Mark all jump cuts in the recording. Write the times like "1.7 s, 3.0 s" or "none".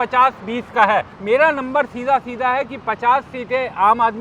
1.1 s